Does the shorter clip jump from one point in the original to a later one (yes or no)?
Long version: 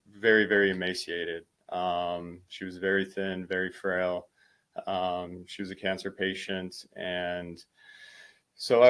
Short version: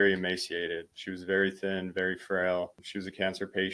yes